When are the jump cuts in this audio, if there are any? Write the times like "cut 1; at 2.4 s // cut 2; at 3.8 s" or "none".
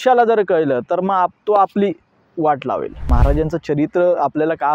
cut 1; at 3.1 s